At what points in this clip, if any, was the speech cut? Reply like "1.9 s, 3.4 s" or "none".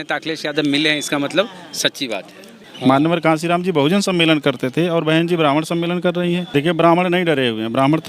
2.6 s, 6.5 s